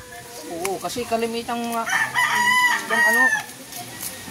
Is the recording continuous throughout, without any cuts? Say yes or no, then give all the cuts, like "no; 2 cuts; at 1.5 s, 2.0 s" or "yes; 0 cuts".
yes; 0 cuts